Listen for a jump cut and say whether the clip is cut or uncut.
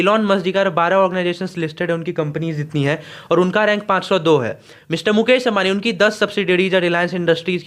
uncut